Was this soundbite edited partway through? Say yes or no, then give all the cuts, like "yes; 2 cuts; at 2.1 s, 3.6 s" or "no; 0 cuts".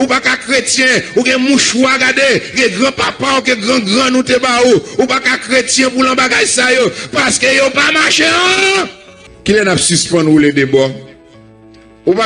yes; 1 cut; at 9.3 s